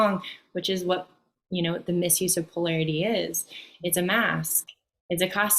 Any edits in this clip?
no; 0 cuts

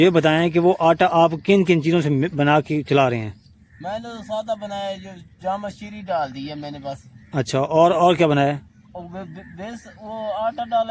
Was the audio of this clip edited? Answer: no; 0 cuts

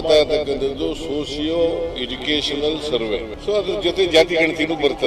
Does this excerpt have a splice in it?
yes; 1 cut; at 3.3 s

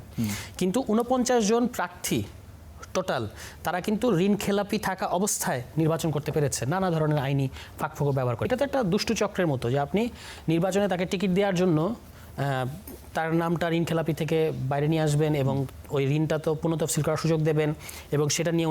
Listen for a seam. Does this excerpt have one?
yes; 1 cut; at 8.5 s

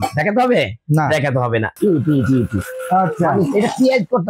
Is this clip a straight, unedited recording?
no; 1 cut; at 1.7 s

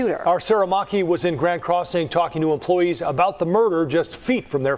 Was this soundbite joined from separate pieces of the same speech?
no; 0 cuts

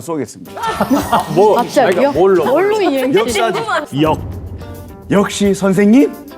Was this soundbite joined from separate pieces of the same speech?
yes; 1 cut; at 3.9 s

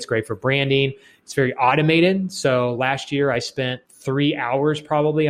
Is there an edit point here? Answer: yes; 1 cut; at 3.9 s

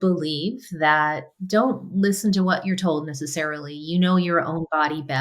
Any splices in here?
yes; 1 cut; at 1.3 s

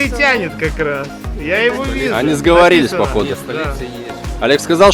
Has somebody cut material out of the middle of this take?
no; 0 cuts

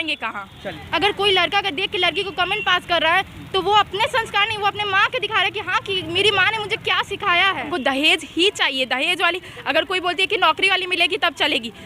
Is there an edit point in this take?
yes; 2 cuts; at 0.8 s, 7.7 s

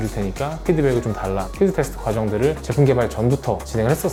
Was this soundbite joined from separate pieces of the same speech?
no; 0 cuts

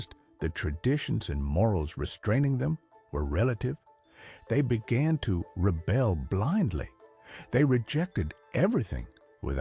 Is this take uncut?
yes; 0 cuts

